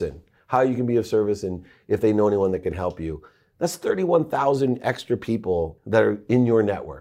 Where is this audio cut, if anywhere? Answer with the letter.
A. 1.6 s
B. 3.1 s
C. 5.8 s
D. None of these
C